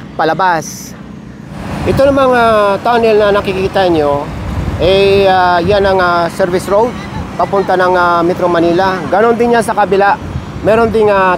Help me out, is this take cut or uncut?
cut